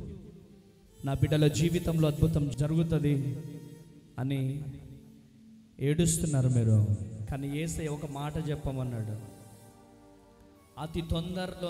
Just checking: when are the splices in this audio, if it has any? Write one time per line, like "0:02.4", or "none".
0:02.5
0:07.1

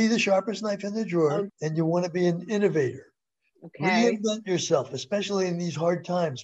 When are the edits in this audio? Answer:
0:01.5

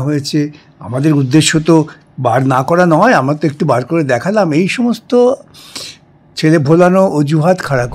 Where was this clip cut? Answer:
none

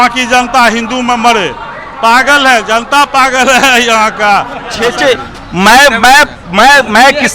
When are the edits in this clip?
0:04.8

